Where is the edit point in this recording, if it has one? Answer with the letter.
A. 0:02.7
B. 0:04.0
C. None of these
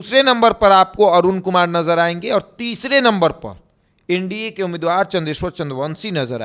C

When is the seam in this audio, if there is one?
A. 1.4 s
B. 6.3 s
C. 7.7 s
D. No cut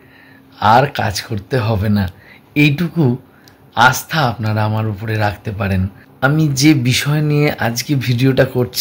B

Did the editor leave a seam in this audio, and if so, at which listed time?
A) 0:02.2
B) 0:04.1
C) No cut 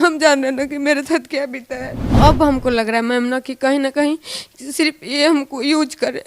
A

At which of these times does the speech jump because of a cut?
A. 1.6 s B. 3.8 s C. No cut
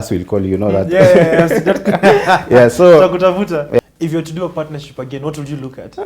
B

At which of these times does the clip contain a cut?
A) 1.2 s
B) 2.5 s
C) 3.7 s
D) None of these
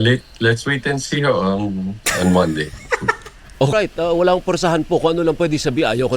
C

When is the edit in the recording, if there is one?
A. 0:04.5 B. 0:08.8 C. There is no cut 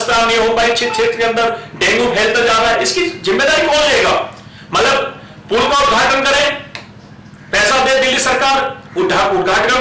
C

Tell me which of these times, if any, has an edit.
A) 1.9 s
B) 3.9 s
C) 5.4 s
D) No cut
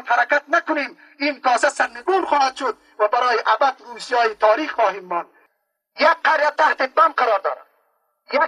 C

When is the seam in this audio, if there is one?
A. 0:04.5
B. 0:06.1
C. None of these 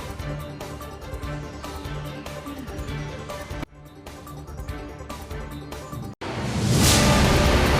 B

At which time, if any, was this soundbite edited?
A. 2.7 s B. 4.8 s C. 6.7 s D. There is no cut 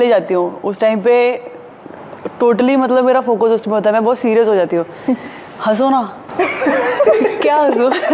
D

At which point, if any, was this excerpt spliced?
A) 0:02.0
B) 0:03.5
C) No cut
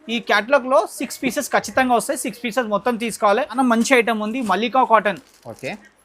B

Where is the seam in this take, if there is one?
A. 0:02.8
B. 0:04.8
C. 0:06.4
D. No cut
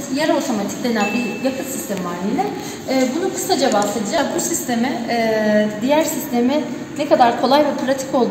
D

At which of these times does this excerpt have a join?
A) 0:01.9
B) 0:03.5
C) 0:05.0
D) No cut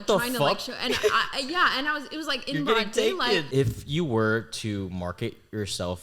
B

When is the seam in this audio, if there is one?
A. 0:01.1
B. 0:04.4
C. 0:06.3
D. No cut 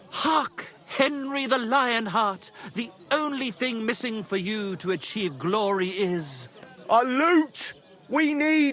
D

